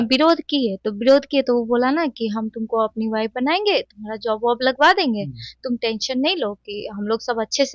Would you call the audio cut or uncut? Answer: uncut